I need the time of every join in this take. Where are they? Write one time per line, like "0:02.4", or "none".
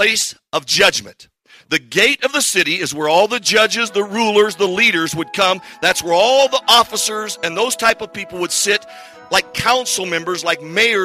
none